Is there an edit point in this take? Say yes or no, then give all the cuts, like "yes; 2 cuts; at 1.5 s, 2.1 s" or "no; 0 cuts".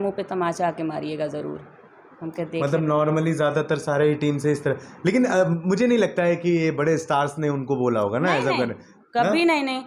no; 0 cuts